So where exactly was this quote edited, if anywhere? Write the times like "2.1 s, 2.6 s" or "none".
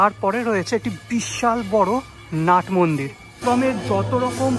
3.2 s